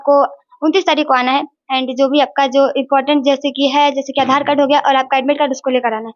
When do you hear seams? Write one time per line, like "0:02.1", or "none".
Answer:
none